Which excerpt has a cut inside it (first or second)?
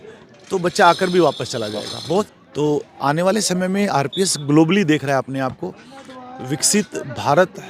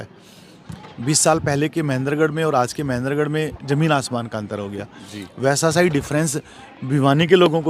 first